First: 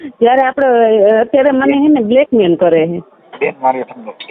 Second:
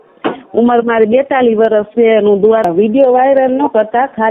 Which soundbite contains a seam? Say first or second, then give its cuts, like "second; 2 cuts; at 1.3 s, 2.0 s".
second; 1 cut; at 2.7 s